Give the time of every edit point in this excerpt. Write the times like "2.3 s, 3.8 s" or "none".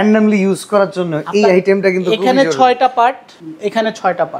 3.3 s